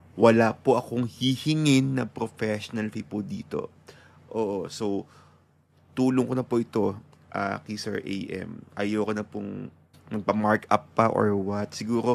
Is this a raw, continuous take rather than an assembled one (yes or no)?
yes